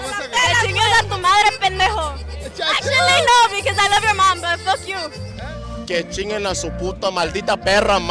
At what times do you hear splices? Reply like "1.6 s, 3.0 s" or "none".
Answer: 5.2 s

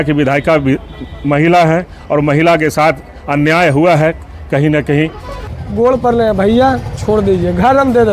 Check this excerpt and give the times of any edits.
5.5 s

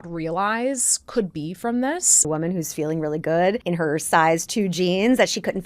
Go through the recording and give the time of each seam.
2.3 s, 3.6 s

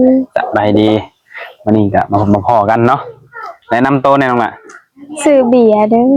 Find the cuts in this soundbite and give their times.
none

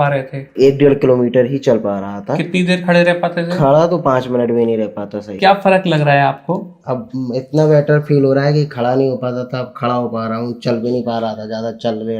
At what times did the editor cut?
5.3 s

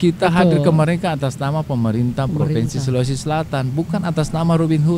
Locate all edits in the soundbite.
none

